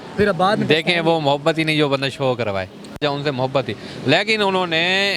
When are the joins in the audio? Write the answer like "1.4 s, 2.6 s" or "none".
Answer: 3.0 s